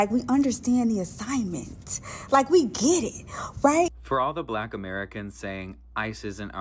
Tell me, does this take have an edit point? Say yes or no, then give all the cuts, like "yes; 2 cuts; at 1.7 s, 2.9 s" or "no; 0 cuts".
yes; 1 cut; at 4.0 s